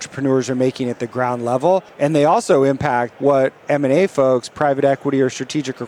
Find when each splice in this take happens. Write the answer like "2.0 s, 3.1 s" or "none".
1.9 s, 3.1 s

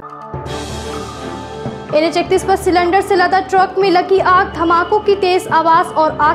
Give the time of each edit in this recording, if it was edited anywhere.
1.6 s

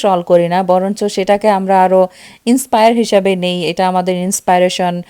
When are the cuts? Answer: none

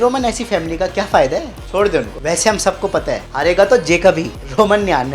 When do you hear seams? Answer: 2.1 s

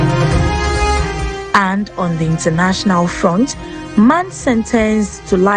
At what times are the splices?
1.1 s

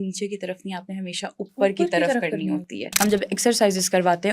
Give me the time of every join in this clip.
3.0 s

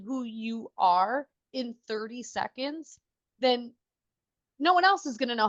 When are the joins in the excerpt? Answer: none

